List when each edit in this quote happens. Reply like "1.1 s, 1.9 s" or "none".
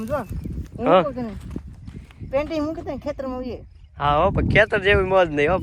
none